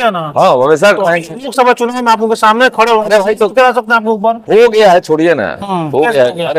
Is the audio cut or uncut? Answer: uncut